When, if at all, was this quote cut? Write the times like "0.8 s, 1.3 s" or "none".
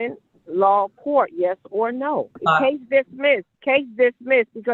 2.3 s, 3.5 s

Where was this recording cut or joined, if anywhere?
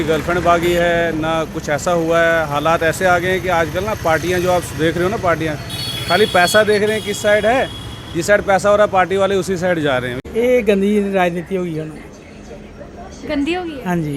10.1 s

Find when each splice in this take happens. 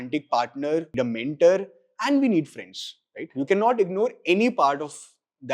0.9 s

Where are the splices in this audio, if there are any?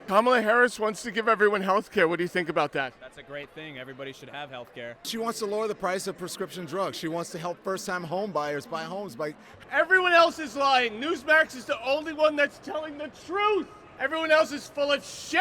5.0 s, 9.5 s, 13.8 s

